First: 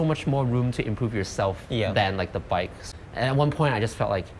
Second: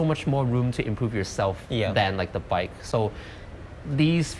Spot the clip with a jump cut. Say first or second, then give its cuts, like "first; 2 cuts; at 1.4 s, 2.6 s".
first; 1 cut; at 2.8 s